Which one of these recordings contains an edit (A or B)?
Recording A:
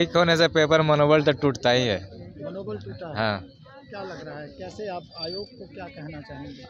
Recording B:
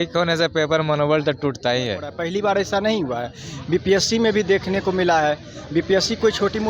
B